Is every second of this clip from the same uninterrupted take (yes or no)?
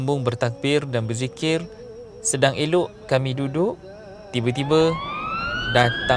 no